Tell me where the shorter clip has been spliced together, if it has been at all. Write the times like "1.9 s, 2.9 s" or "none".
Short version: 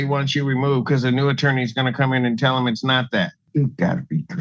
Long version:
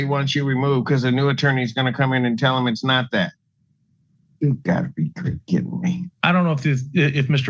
3.4 s